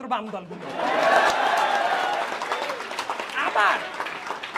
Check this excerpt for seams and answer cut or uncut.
uncut